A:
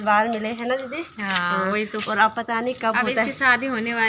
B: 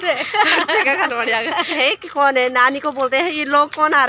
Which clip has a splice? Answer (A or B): B